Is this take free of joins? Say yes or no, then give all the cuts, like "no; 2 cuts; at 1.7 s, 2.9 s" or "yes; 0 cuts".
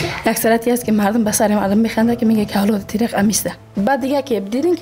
no; 1 cut; at 3.6 s